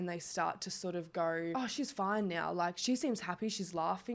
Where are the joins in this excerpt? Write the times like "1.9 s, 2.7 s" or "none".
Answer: 1.5 s

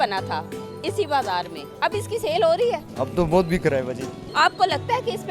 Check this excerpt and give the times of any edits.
1.6 s, 2.9 s, 4.2 s

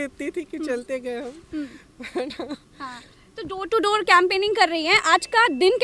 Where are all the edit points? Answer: none

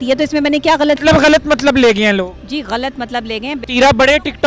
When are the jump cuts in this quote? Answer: 1.0 s, 3.6 s

